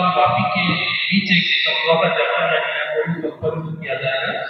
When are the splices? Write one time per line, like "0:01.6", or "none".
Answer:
none